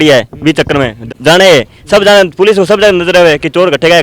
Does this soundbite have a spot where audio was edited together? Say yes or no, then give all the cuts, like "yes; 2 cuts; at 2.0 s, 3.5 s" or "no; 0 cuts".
yes; 1 cut; at 1.0 s